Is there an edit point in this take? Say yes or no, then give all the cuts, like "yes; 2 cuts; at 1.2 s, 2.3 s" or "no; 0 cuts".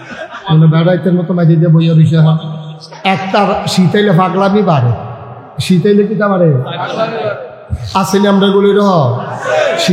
yes; 1 cut; at 2.9 s